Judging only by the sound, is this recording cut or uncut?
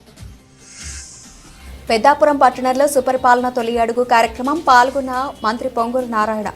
cut